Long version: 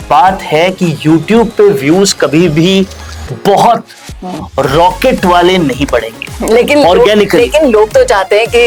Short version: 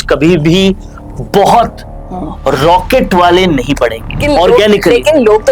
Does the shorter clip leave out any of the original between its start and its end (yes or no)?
yes